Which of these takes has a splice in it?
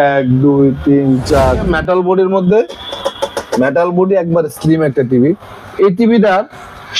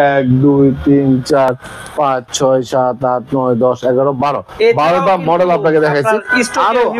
first; 1 cut; at 1.6 s

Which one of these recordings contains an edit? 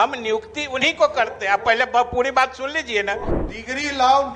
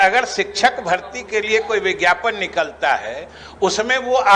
first; 1 cut; at 3.3 s

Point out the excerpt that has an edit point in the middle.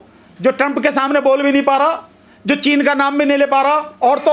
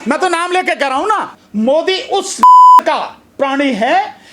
second; 1 cut; at 1.3 s

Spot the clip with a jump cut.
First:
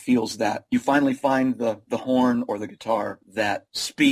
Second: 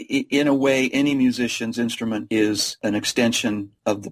second; 1 cut; at 2.8 s

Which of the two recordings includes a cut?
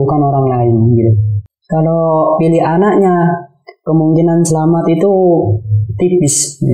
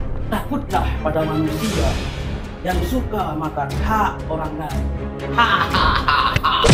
first; 1 cut; at 1.3 s

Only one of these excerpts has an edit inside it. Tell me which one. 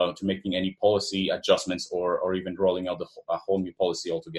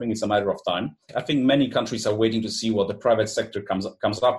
second; 1 cut; at 1.1 s

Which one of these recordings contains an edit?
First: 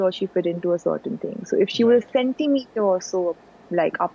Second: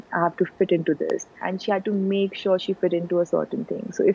second; 1 cut; at 1.4 s

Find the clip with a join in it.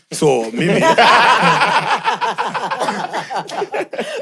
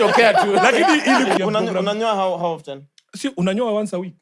second; 1 cut; at 1.4 s

